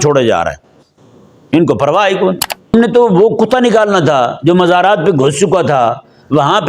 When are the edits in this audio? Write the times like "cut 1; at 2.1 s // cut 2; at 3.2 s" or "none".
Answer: cut 1; at 2.7 s